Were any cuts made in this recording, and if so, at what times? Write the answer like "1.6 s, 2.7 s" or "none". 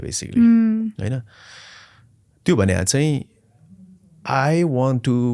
none